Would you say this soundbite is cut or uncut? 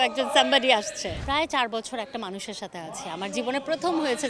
cut